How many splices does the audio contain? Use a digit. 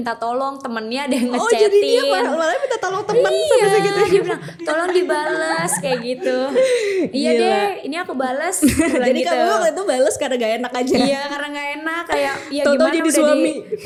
0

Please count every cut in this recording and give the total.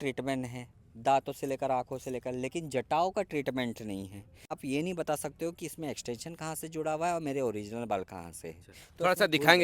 1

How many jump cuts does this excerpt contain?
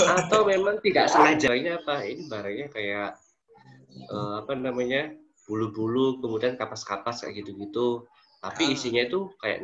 1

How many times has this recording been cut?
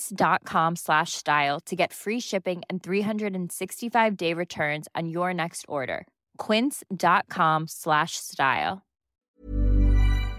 1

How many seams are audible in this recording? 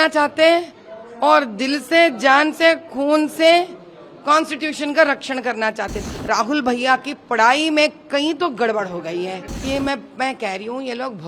2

